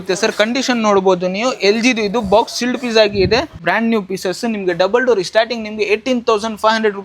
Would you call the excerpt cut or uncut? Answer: cut